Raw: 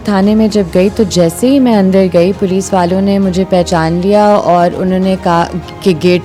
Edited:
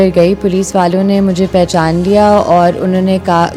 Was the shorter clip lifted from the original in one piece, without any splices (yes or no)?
yes